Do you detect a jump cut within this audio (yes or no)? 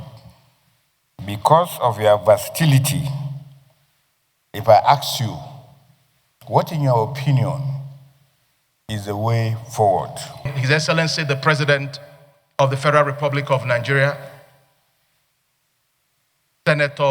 yes